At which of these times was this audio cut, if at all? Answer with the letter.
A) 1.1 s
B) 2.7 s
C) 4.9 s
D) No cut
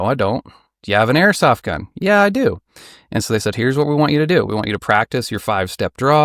D